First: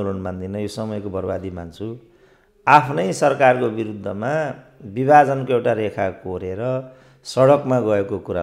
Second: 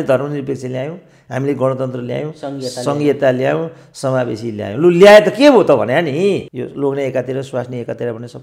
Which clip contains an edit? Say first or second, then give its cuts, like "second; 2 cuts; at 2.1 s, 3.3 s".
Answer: second; 1 cut; at 6.5 s